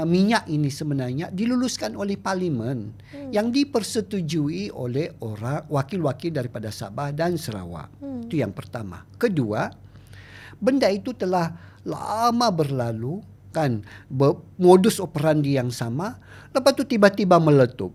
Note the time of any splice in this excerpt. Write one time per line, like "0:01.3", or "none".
none